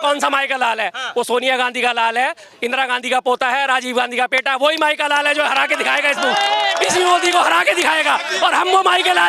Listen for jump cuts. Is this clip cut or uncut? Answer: uncut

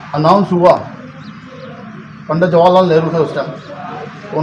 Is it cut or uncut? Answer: uncut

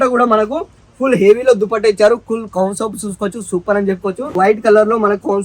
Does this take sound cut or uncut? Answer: cut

